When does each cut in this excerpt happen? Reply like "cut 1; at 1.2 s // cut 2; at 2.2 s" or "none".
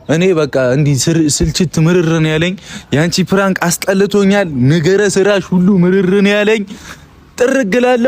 none